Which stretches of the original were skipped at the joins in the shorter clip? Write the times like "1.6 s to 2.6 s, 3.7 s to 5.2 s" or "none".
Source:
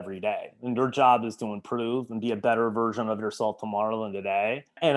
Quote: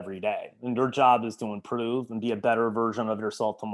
none